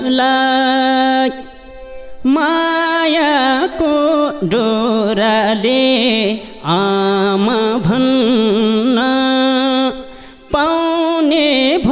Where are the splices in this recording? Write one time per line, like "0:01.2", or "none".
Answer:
none

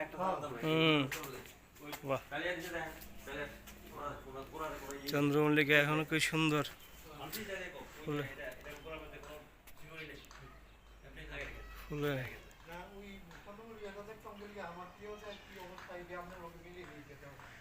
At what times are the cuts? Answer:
none

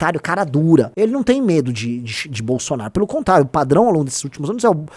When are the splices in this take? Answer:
0:00.9

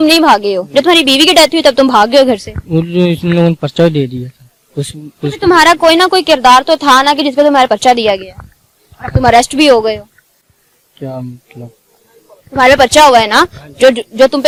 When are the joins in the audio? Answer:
none

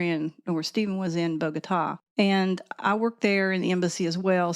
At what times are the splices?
0:02.0

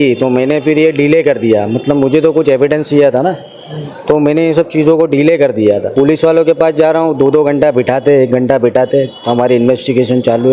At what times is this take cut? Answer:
0:05.9

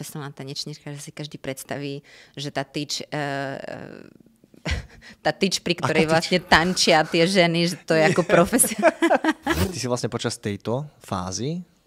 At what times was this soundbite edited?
0:09.7

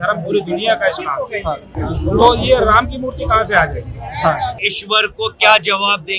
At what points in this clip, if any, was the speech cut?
0:01.7
0:04.6

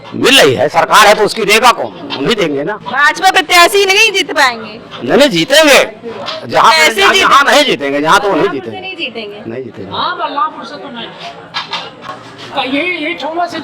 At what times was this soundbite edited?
none

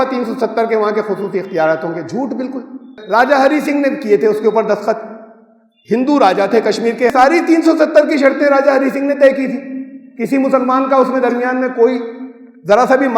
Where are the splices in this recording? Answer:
0:02.9
0:07.1

